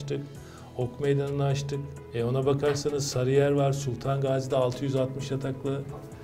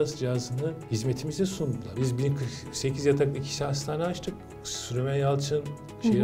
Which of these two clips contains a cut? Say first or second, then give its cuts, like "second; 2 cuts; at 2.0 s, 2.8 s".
second; 2 cuts; at 0.8 s, 1.9 s